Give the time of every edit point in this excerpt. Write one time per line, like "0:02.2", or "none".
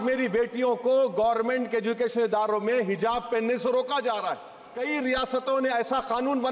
0:04.7